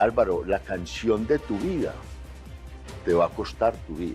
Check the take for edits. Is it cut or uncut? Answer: uncut